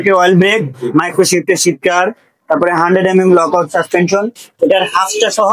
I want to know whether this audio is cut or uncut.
uncut